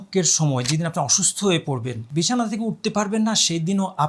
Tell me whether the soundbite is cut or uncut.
cut